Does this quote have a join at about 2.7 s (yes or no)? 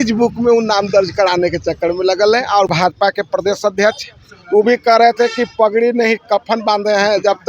yes